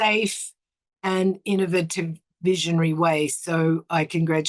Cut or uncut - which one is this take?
uncut